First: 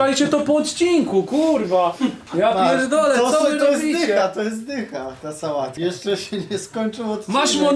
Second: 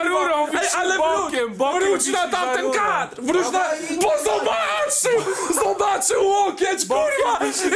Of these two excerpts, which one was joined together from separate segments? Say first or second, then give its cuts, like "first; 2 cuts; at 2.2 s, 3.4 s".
first; 1 cut; at 5.7 s